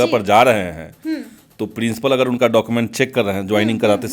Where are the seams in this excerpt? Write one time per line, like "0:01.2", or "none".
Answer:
none